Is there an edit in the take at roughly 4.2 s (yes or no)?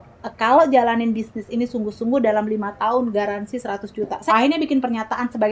yes